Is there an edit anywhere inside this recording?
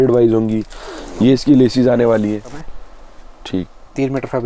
yes; 1 cut; at 2.6 s

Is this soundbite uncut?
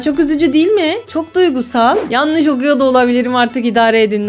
no; 1 cut; at 2.0 s

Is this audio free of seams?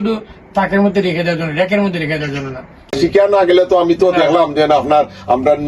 no; 1 cut; at 2.9 s

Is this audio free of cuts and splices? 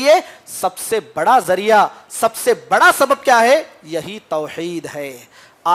yes; 0 cuts

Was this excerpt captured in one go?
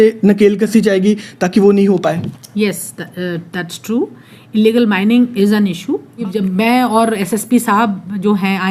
no; 1 cut; at 6.3 s

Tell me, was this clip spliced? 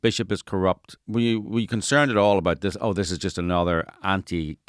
yes; 1 cut; at 0.9 s

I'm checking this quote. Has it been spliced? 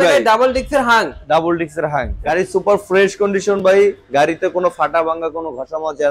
yes; 1 cut; at 2.1 s

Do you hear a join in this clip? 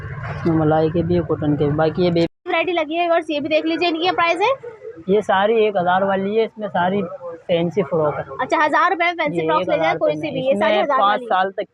no; 0 cuts

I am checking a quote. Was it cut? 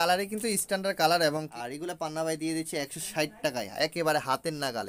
yes; 1 cut; at 1.5 s

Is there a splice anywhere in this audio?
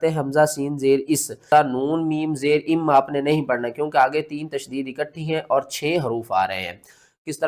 yes; 1 cut; at 1.4 s

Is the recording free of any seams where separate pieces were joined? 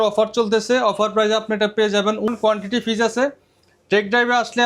no; 1 cut; at 2.3 s

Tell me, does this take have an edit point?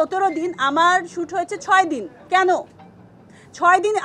no; 0 cuts

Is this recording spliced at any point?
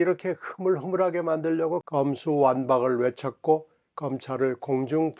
yes; 1 cut; at 1.8 s

